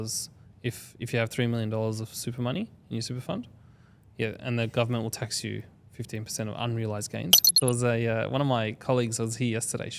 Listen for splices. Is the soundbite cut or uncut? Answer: cut